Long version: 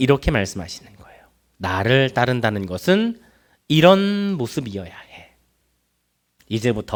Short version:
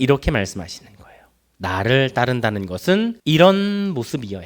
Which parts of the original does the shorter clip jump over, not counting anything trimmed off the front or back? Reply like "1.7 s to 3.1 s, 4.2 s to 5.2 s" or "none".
3.2 s to 3.6 s